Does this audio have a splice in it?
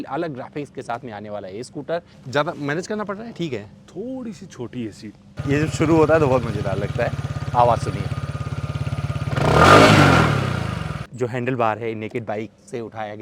yes; 3 cuts; at 2.2 s, 5.3 s, 11.0 s

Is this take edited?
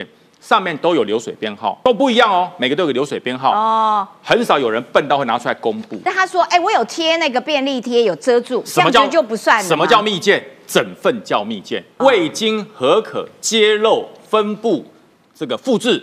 yes; 3 cuts; at 1.8 s, 6.0 s, 11.9 s

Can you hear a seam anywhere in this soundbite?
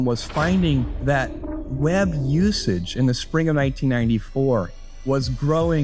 no; 0 cuts

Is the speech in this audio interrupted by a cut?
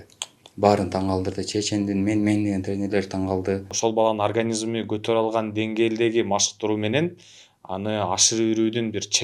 yes; 1 cut; at 3.7 s

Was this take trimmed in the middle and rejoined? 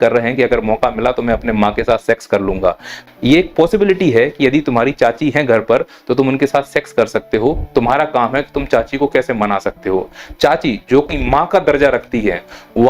yes; 1 cut; at 2.9 s

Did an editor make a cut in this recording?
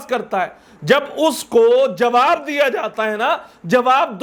no; 0 cuts

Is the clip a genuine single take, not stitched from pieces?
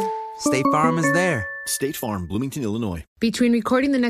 no; 1 cut; at 3.1 s

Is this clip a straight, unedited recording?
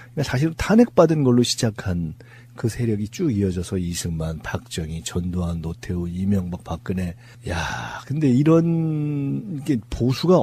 no; 1 cut; at 7.0 s

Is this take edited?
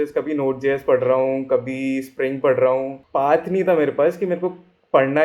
yes; 1 cut; at 3.0 s

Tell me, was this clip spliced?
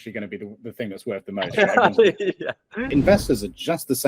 yes; 1 cut; at 2.9 s

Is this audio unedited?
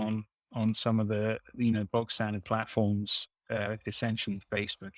yes; 0 cuts

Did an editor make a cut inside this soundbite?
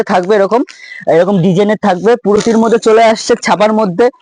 yes; 1 cut; at 2.4 s

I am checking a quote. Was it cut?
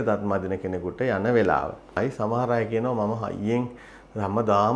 yes; 1 cut; at 2.0 s

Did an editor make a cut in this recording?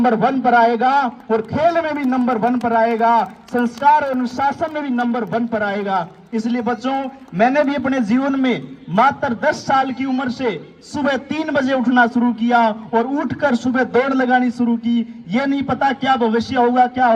no; 0 cuts

